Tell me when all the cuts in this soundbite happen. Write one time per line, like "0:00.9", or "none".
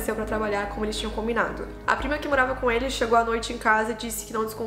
0:01.6